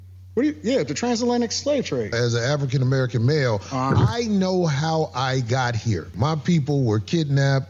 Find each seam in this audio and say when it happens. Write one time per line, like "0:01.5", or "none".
0:02.1